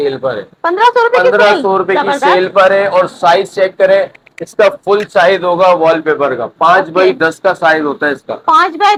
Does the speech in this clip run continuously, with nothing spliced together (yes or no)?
yes